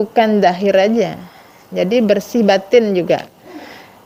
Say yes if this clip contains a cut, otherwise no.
no